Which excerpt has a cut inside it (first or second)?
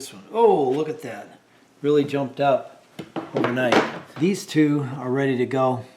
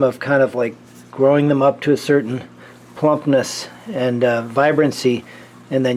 first